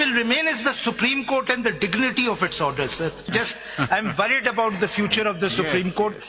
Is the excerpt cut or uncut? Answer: cut